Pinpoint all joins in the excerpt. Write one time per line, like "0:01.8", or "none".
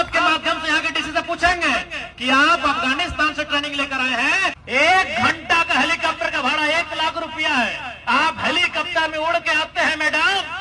0:04.6